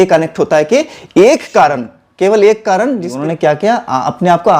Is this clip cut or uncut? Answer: cut